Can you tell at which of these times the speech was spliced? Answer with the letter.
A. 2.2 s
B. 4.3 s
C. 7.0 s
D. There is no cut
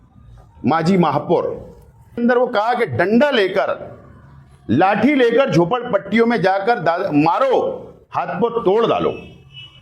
A